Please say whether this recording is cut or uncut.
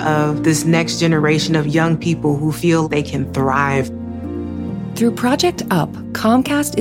uncut